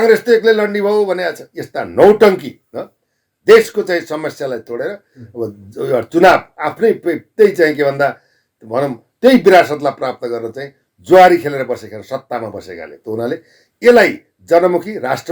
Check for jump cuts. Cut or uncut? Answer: uncut